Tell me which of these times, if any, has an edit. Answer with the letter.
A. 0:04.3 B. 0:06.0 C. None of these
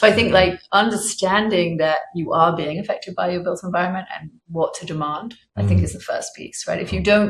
C